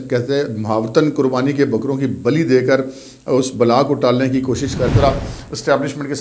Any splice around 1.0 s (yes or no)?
no